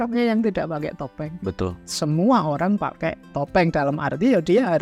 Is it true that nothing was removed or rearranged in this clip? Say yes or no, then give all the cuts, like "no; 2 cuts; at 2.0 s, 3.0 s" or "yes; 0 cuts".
no; 1 cut; at 1.8 s